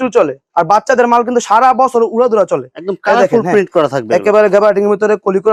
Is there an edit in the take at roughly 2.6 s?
no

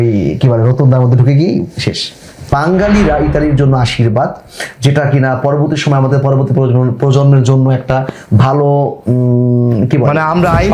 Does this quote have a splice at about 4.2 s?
no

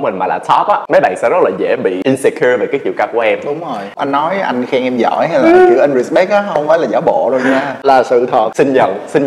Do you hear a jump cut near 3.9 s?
yes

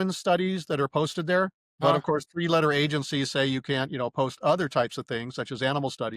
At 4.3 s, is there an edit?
no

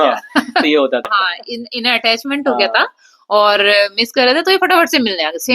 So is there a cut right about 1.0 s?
yes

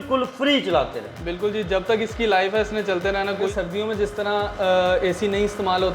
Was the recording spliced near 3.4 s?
yes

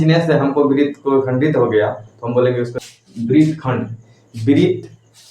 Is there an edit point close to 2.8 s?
yes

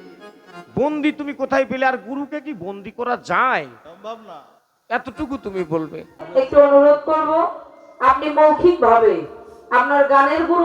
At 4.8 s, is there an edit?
no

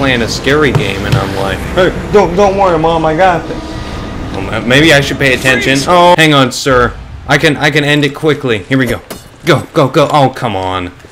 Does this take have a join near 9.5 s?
no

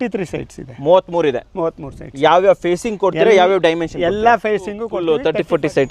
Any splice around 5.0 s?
yes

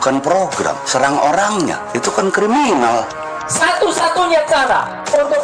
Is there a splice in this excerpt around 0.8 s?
yes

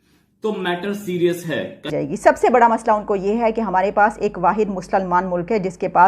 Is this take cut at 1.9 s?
yes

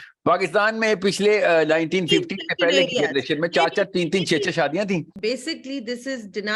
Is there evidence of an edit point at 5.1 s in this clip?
yes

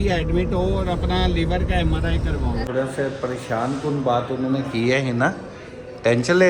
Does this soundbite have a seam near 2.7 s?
yes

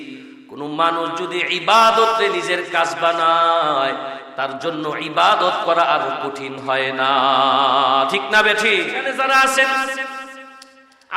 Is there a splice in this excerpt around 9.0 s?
yes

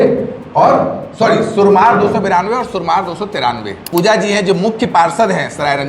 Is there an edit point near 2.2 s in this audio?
no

